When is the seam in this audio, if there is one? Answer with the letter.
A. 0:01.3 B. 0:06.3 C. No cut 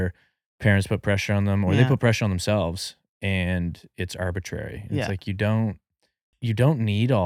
B